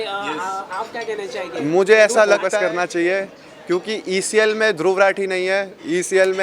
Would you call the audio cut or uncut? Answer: cut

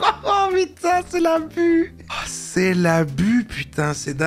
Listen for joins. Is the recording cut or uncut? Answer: uncut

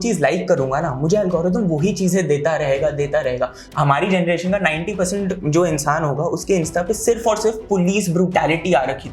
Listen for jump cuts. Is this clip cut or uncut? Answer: cut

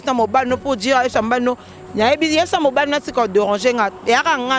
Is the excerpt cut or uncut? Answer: uncut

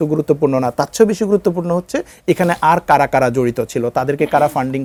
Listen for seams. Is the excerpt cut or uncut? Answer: uncut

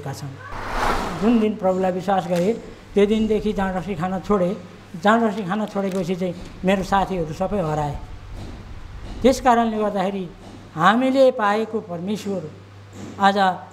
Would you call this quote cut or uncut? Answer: cut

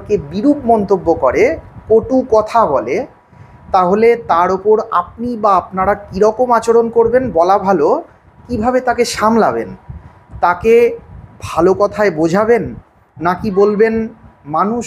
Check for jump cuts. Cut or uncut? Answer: uncut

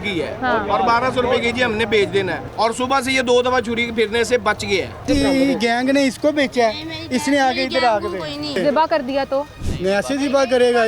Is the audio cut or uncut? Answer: cut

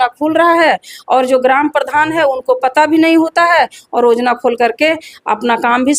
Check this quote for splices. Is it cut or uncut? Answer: uncut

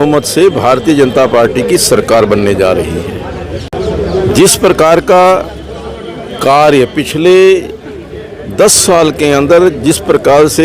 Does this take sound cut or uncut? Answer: uncut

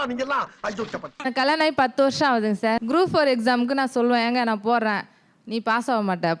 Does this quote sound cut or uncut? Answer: cut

